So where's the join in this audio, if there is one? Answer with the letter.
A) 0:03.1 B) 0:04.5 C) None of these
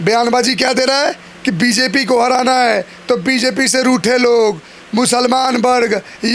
C